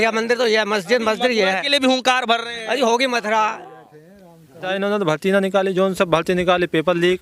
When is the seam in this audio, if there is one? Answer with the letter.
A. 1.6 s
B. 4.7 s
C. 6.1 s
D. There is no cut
B